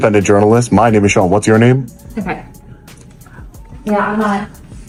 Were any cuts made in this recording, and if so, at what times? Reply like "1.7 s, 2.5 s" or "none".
none